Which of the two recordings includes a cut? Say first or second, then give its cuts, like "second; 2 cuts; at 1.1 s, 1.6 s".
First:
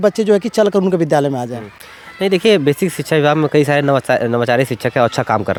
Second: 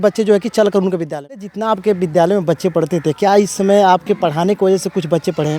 second; 1 cut; at 1.5 s